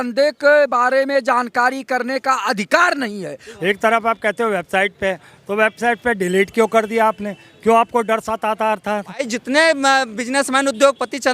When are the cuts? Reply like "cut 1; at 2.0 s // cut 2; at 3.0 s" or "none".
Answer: cut 1; at 3.5 s // cut 2; at 9.2 s